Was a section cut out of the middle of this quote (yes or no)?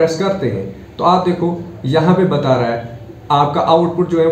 no